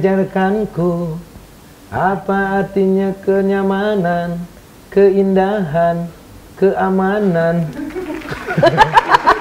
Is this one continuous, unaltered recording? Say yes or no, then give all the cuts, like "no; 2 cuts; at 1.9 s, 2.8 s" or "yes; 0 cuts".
yes; 0 cuts